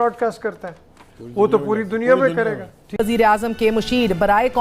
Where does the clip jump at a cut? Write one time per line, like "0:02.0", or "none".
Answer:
0:02.9